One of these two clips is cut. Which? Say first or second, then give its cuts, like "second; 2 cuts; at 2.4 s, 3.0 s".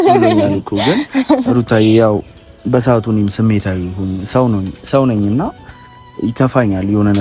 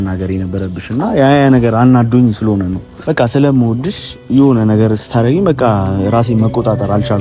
second; 1 cut; at 2.9 s